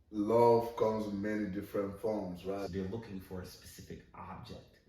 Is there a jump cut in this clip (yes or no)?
yes